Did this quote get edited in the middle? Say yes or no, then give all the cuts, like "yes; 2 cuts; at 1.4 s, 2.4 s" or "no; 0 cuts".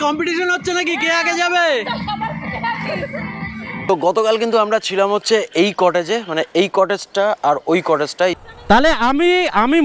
yes; 2 cuts; at 3.7 s, 8.4 s